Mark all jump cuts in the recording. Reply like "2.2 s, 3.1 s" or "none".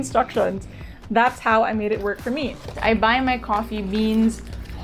2.7 s